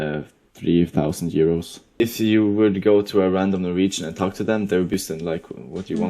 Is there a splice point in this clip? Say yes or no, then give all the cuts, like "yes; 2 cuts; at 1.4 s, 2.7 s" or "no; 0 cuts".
yes; 2 cuts; at 2.0 s, 4.9 s